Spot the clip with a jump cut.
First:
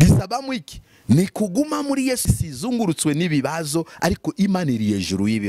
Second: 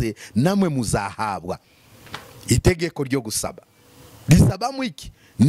first; 1 cut; at 2.2 s

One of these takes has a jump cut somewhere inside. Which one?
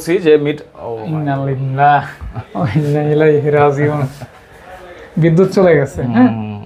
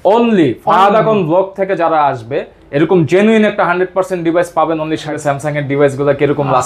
second; 1 cut; at 5.1 s

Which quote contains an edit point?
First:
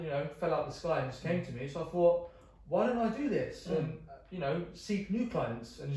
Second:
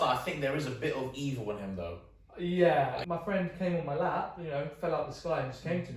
second; 1 cut; at 3.0 s

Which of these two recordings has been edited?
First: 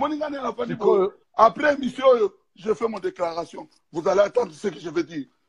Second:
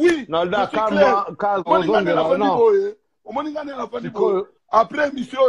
second; 1 cut; at 1.7 s

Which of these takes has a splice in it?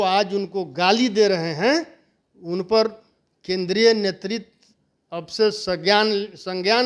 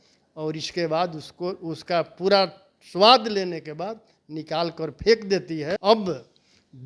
second; 1 cut; at 5.8 s

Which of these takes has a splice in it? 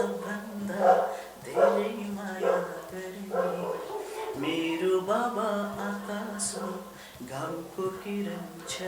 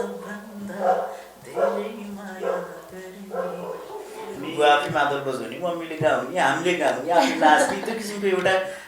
second; 1 cut; at 4.4 s

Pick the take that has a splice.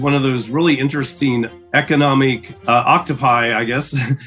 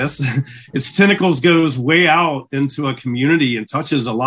first; 2 cuts; at 1.5 s, 2.5 s

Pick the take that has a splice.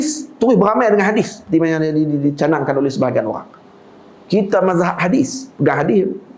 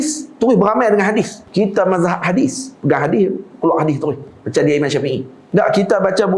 second; 2 cuts; at 1.4 s, 5.3 s

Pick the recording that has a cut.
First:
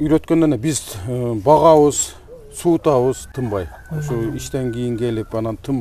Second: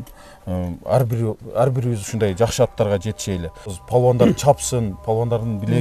second; 1 cut; at 3.8 s

